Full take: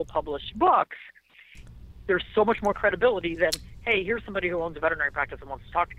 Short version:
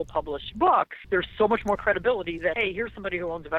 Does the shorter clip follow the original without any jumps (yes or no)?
no